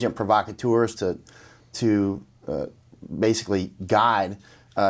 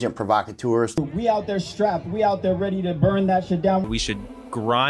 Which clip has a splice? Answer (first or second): second